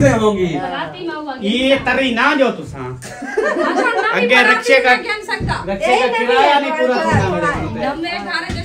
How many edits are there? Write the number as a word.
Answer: zero